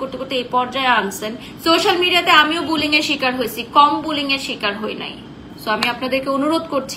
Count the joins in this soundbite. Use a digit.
2